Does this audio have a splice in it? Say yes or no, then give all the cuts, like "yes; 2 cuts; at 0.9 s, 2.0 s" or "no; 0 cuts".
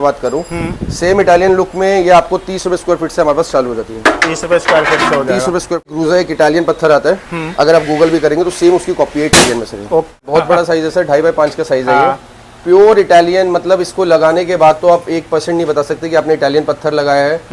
yes; 2 cuts; at 5.9 s, 10.2 s